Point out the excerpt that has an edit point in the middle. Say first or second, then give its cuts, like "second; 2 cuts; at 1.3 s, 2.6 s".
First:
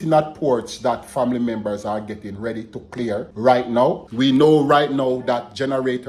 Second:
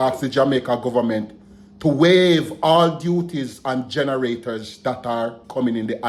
first; 2 cuts; at 3.3 s, 4.1 s